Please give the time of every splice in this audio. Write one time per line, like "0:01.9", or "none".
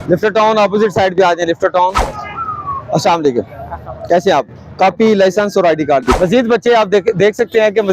0:02.1
0:06.2